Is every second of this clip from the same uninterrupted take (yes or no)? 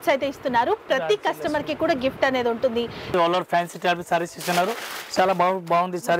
no